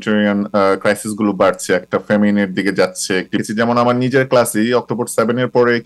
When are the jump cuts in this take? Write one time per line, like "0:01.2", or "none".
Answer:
0:03.4